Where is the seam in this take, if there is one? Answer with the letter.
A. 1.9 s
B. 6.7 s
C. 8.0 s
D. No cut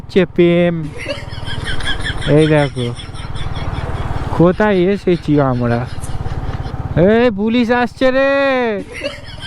B